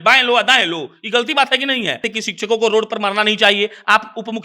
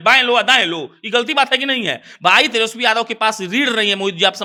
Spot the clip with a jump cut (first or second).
first